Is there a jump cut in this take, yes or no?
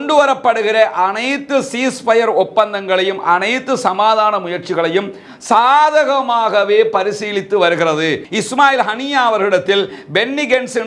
yes